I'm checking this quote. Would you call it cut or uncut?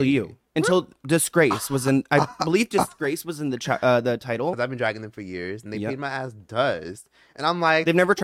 cut